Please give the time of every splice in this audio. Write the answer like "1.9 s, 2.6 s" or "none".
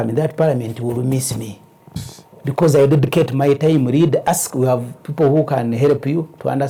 none